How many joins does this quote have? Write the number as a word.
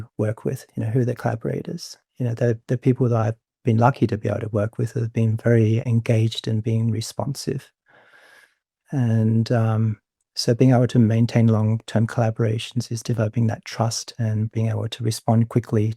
zero